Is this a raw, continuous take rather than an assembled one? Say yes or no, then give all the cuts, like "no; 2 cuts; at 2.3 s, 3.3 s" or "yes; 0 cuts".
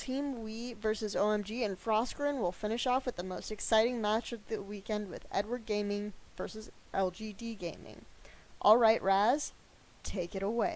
yes; 0 cuts